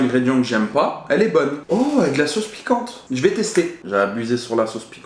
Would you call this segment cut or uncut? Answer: cut